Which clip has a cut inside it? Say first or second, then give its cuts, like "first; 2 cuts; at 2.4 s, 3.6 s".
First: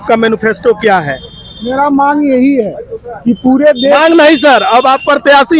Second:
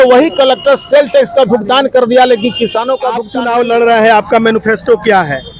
second; 1 cut; at 3.3 s